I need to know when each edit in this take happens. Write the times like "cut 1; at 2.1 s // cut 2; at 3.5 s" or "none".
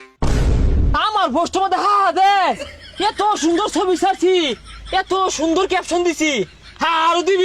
cut 1; at 0.9 s